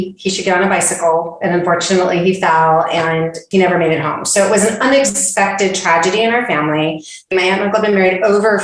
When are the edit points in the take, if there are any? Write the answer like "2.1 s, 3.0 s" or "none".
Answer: 7.3 s